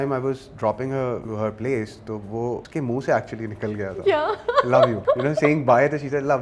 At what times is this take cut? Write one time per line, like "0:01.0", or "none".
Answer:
0:01.2
0:02.6
0:05.0